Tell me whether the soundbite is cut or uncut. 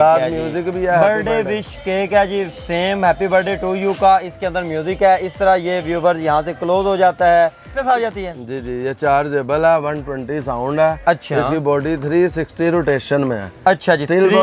cut